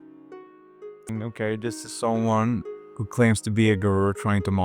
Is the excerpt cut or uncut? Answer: cut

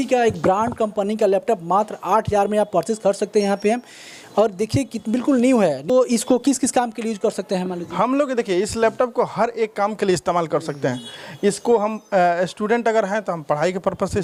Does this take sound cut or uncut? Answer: uncut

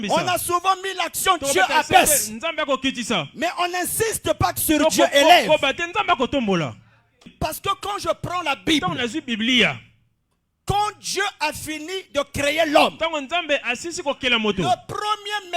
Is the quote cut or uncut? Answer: cut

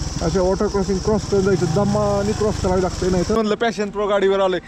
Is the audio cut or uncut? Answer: cut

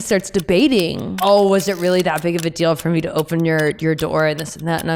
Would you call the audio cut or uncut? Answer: cut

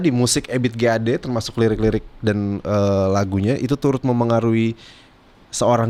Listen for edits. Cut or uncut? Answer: uncut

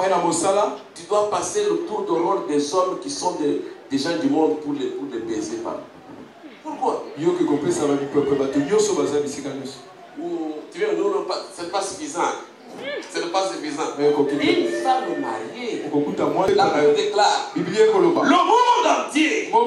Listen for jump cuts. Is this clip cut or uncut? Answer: cut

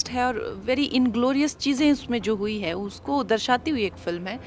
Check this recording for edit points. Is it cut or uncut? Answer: uncut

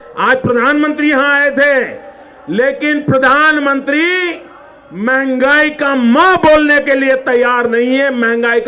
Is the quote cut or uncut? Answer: uncut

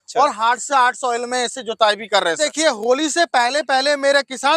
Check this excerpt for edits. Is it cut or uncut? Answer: cut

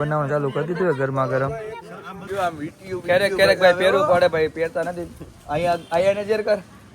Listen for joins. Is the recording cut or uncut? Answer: cut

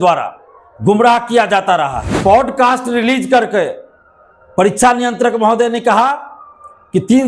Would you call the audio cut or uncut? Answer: cut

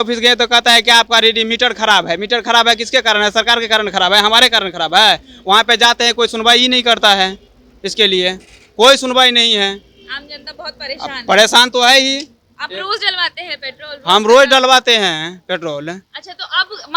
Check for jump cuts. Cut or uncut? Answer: uncut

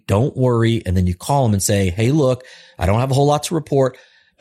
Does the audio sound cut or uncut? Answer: uncut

